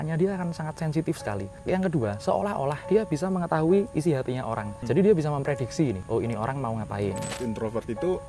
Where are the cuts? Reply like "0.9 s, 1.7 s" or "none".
1.5 s, 2.8 s, 4.7 s, 6.0 s, 7.4 s